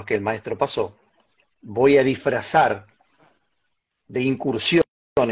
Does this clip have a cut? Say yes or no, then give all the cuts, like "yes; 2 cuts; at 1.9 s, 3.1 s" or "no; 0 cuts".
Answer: no; 0 cuts